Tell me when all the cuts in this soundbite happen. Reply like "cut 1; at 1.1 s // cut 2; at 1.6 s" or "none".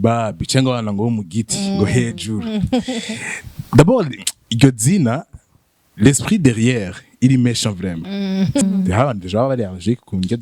cut 1; at 8.6 s

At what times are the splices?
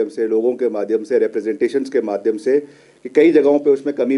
none

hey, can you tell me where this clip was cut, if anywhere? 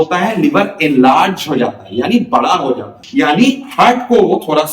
cut 1; at 2.9 s

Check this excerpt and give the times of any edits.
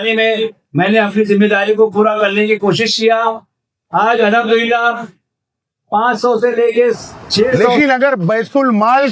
cut 1; at 7.7 s

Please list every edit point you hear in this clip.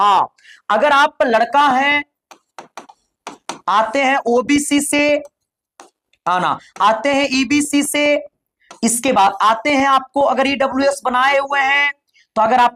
none

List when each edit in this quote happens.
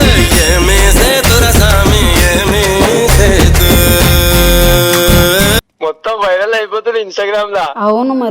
cut 1; at 5.6 s

